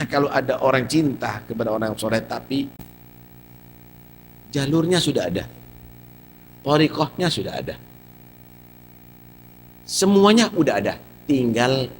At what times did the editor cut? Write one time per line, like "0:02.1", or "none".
0:02.8

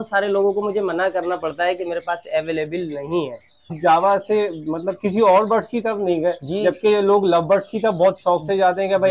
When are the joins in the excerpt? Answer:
0:03.7

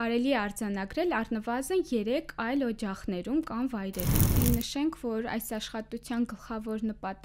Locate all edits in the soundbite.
0:04.2

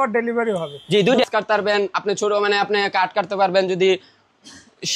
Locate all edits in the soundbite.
0:01.2

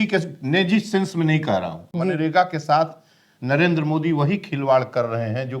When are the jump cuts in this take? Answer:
0:01.8

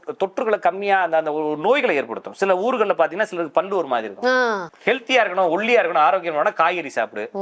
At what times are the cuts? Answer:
0:04.7

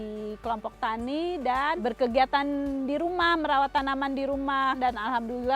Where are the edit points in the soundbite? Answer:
0:01.8
0:04.8

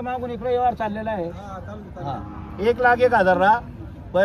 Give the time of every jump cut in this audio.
none

